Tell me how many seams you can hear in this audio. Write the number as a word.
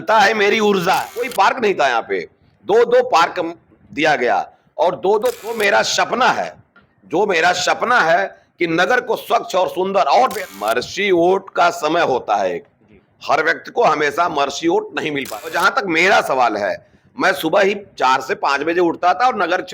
four